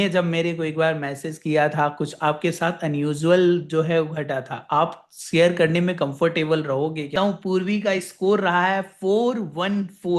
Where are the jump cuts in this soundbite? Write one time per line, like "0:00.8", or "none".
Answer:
0:07.1

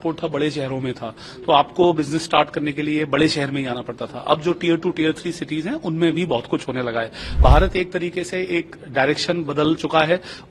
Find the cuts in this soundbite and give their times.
0:07.2

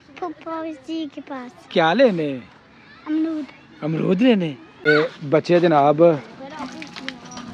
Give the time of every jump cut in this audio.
0:04.9

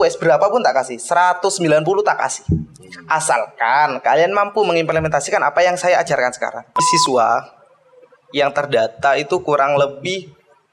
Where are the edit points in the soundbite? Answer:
0:06.8

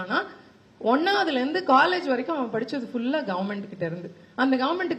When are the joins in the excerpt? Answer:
none

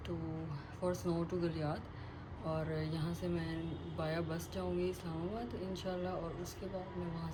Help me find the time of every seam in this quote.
none

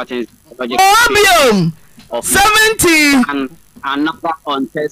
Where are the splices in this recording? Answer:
none

